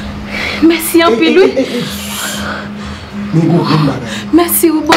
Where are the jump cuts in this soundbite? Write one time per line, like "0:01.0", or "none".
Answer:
0:02.8